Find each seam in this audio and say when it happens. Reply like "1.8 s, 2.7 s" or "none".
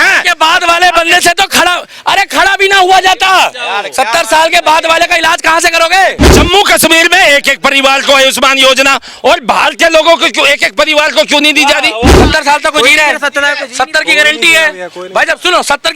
6.2 s, 12.1 s